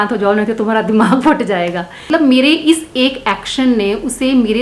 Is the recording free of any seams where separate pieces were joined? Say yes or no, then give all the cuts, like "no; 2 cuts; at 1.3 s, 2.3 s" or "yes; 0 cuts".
no; 1 cut; at 2.0 s